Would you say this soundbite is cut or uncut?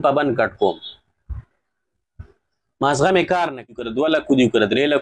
cut